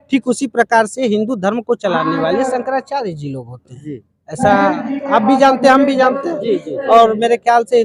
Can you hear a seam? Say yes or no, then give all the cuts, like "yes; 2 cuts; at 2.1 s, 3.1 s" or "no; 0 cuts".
no; 0 cuts